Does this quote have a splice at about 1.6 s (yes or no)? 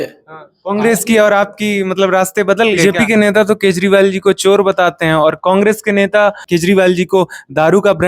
no